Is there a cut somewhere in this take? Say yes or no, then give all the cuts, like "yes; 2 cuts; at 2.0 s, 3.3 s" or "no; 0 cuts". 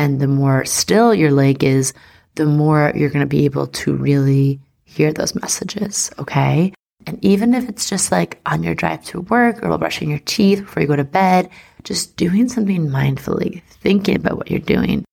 no; 0 cuts